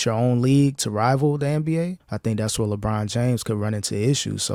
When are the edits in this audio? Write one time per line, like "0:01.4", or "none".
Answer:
none